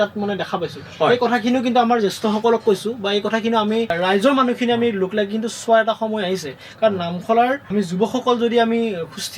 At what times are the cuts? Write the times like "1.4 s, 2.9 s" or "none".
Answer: 3.9 s, 7.7 s